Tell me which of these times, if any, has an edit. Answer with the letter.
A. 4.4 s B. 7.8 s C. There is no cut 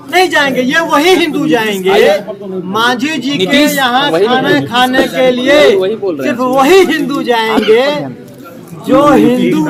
C